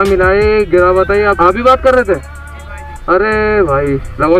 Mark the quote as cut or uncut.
cut